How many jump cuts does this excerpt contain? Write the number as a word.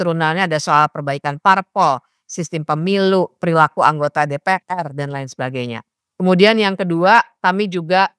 zero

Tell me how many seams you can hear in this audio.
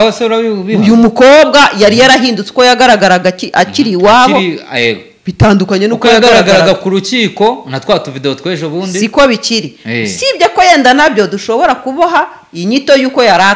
zero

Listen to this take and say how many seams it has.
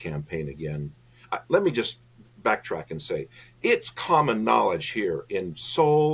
zero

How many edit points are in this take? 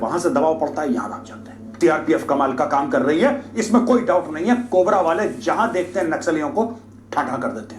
one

